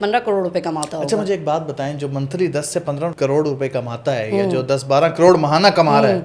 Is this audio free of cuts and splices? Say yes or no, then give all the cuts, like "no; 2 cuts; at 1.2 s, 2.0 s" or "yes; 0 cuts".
yes; 0 cuts